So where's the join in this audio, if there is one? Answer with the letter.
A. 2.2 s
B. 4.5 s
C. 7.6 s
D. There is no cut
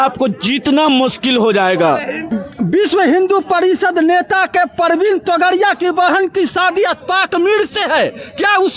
A